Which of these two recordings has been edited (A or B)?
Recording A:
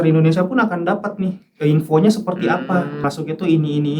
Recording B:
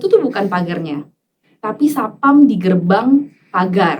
A